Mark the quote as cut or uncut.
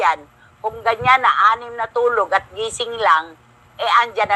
uncut